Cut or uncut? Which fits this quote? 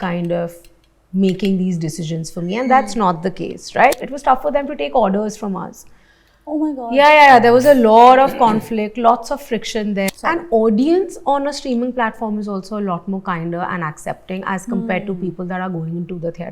cut